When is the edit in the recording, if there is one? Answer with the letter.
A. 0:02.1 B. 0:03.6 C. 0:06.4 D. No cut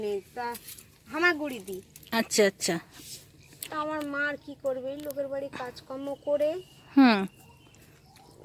D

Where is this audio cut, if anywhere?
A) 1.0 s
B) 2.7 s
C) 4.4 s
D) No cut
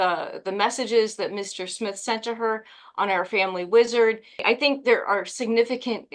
C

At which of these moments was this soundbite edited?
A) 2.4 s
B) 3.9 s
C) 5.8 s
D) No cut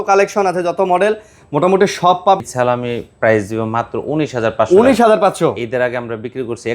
A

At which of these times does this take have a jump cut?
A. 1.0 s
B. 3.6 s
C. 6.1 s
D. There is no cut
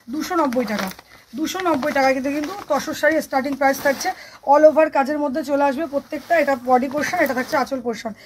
D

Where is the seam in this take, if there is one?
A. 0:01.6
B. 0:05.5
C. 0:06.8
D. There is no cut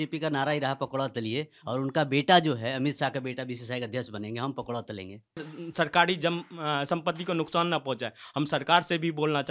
B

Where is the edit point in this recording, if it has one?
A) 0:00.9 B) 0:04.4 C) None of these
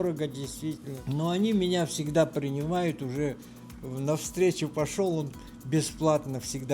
A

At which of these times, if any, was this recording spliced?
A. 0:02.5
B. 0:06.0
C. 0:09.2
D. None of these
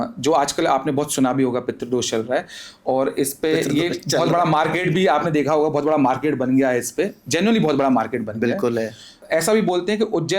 C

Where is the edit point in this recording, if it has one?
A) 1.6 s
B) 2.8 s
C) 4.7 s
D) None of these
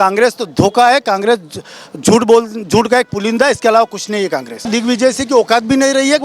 C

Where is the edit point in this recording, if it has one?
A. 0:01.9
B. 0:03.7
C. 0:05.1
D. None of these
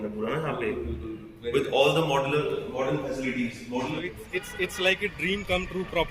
B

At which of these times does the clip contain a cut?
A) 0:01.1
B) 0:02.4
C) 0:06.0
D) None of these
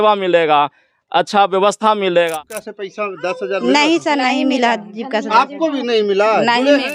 B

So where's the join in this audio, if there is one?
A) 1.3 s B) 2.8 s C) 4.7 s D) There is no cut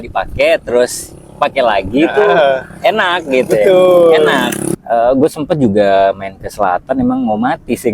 C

